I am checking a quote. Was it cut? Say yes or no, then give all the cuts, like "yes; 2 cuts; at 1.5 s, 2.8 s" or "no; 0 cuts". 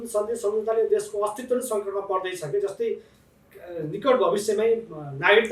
no; 0 cuts